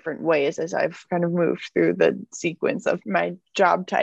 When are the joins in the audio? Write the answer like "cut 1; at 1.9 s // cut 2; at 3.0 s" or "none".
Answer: cut 1; at 1.1 s // cut 2; at 3.0 s